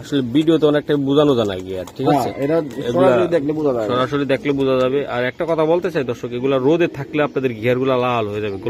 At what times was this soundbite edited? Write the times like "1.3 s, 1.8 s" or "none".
none